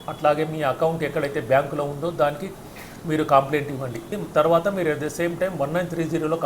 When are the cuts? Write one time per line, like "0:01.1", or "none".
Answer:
0:04.0